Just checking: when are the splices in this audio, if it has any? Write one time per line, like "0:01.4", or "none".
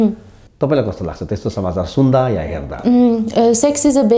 none

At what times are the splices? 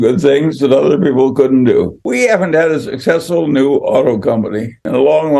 0:02.0

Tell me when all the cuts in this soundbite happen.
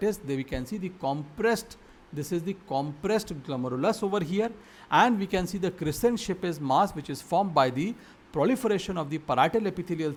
none

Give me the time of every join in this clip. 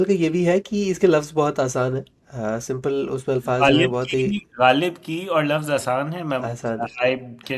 none

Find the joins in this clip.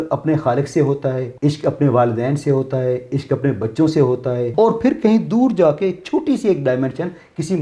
0:01.3
0:04.5

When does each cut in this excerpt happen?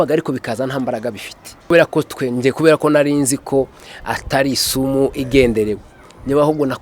0:01.7

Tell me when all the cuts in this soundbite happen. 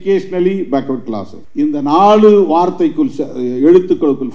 0:01.4

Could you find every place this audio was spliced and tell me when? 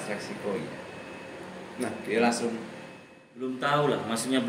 0:03.5

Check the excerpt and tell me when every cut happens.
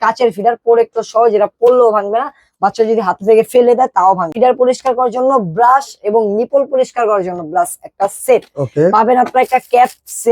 0:04.3

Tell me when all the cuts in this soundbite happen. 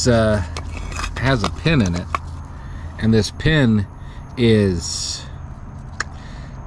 none

